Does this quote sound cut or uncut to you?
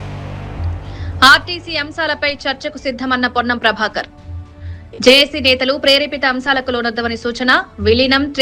uncut